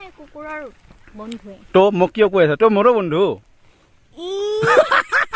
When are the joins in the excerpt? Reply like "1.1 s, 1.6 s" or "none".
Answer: none